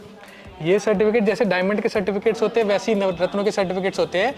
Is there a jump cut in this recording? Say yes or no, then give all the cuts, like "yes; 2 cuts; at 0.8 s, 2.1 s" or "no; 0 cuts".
no; 0 cuts